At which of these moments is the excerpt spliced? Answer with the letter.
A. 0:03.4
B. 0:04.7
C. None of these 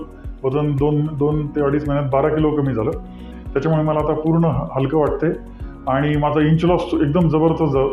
A